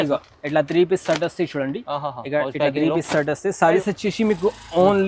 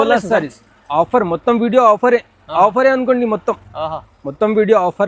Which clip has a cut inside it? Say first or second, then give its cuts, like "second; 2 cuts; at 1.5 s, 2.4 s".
first; 1 cut; at 3.8 s